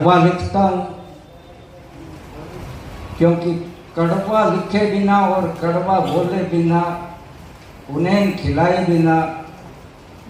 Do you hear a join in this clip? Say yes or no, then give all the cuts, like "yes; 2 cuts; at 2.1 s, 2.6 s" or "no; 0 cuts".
no; 0 cuts